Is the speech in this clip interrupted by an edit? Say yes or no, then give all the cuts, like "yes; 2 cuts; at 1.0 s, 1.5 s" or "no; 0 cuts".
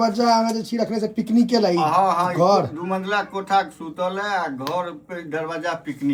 no; 0 cuts